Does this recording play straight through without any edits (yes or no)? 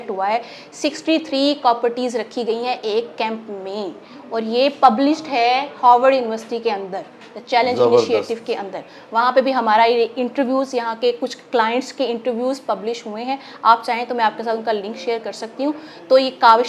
yes